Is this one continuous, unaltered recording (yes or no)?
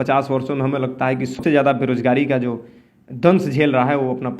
no